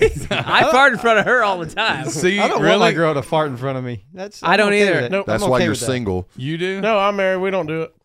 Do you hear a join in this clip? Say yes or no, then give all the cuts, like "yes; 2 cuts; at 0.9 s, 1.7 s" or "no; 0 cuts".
no; 0 cuts